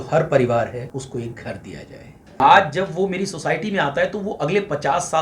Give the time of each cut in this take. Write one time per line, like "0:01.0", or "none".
0:00.9
0:02.3

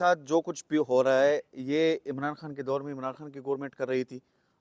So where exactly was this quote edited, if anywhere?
none

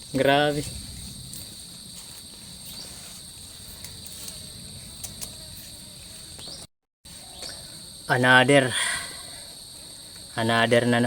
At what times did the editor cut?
none

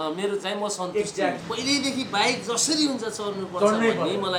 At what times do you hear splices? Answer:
0:01.4

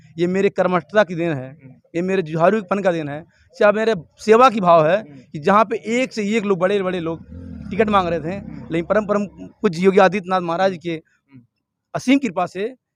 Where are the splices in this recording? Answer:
none

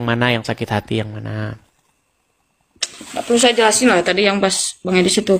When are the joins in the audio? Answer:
none

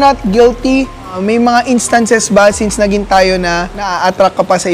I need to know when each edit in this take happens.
0:01.2
0:03.8

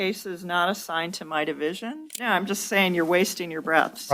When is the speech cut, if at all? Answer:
0:02.1

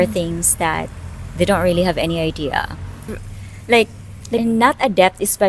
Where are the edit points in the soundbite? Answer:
0:04.4

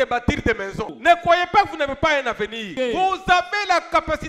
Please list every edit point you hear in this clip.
0:00.9
0:02.7

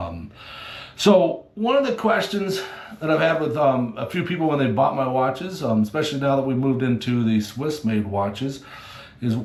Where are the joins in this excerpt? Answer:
none

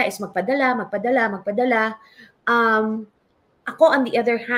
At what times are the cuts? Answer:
none

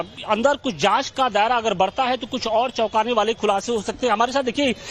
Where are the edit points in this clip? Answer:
0:03.2

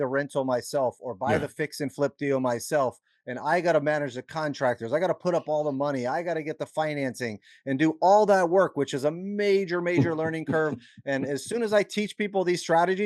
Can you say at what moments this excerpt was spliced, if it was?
none

